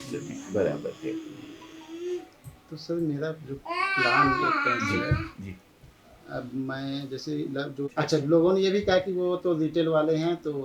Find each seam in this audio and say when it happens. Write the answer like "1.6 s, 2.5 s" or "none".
7.9 s